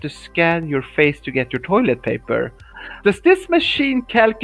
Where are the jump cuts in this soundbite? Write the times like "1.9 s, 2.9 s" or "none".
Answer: 2.8 s